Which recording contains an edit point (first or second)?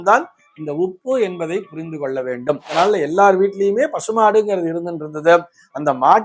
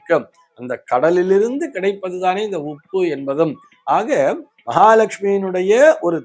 first